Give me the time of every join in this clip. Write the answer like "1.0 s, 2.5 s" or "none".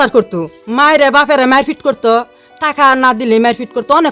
none